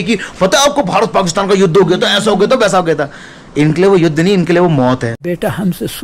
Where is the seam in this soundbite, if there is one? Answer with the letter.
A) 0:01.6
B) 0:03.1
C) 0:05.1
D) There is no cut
C